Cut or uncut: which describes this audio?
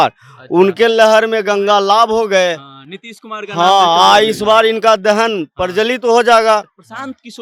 uncut